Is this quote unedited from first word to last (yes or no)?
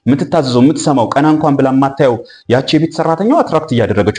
yes